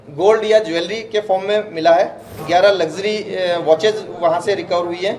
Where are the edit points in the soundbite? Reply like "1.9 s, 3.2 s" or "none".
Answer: 2.4 s